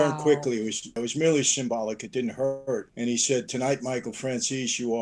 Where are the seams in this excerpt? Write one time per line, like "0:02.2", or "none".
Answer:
0:01.0
0:02.9